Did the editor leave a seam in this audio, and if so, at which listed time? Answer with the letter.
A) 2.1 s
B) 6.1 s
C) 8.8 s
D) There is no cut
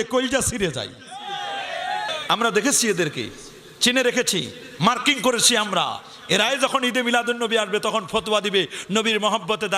A